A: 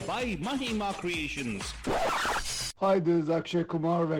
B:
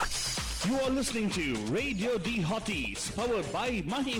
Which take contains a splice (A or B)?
A